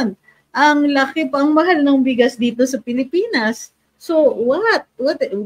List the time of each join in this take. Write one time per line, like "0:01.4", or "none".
none